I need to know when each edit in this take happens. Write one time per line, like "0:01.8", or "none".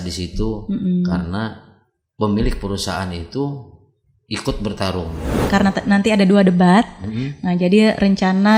0:05.4